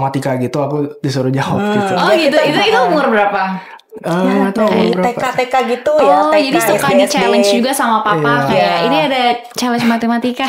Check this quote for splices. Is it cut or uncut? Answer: uncut